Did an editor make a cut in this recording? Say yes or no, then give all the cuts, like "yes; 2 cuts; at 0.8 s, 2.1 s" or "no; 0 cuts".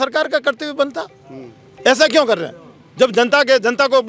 no; 0 cuts